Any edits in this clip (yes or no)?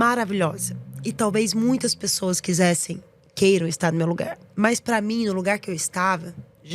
no